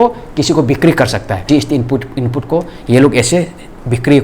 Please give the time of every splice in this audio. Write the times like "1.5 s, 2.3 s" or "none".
1.5 s